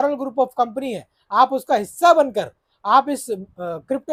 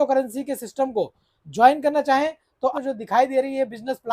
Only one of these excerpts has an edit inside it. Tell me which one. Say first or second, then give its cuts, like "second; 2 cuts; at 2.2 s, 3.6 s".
second; 1 cut; at 2.7 s